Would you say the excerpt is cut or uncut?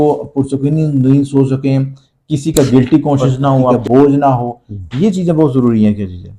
cut